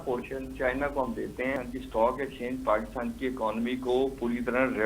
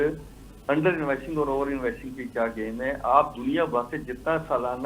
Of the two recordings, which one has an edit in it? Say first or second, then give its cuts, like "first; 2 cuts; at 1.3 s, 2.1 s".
first; 1 cut; at 1.6 s